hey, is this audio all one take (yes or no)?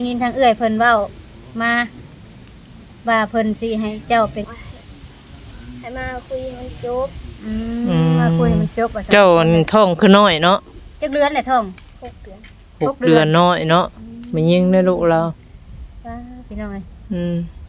no